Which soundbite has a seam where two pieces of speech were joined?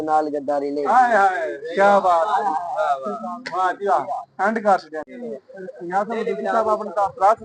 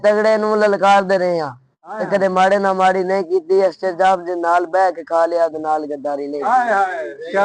first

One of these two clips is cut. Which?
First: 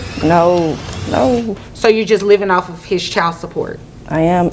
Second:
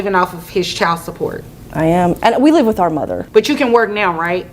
second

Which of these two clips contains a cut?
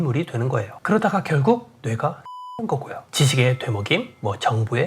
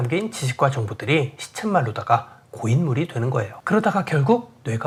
first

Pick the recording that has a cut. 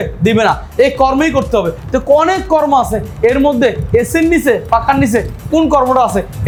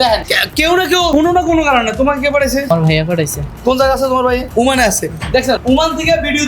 second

